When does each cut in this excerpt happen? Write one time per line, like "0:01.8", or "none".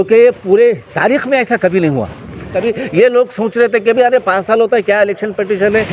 0:02.5